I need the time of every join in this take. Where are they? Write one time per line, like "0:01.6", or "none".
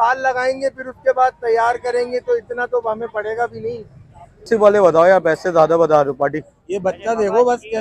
0:04.5